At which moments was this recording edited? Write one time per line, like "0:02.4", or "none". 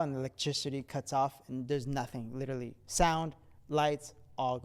none